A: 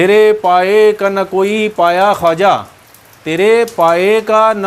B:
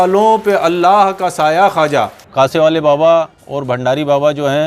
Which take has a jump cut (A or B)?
B